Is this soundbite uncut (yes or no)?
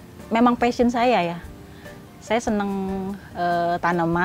yes